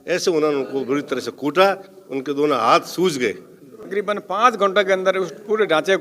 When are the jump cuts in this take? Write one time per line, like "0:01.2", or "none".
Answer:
0:03.8